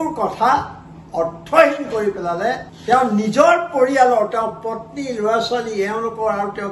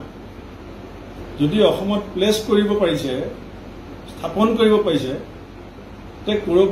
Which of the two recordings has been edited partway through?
first; 1 cut; at 2.7 s

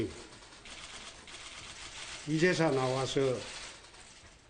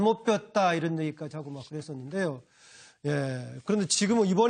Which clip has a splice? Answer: first; 1 cut; at 3.1 s

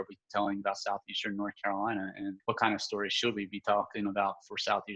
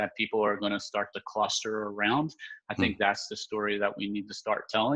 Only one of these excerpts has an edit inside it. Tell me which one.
first; 1 cut; at 2.4 s

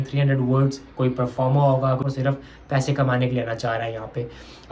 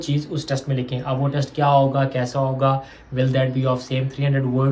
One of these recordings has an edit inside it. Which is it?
first; 1 cut; at 2.0 s

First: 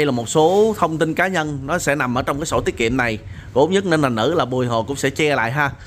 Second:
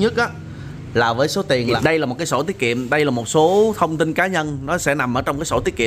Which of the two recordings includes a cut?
second; 1 cut; at 1.7 s

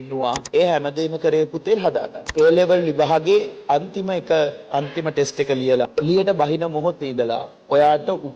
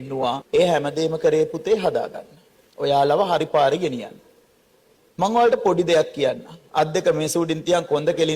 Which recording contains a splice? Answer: first; 2 cuts; at 2.2 s, 5.9 s

